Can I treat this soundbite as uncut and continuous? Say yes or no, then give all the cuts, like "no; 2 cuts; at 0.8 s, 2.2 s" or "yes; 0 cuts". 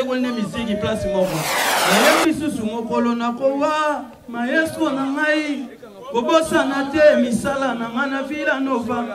no; 1 cut; at 1.6 s